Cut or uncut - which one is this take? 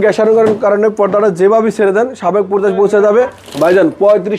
cut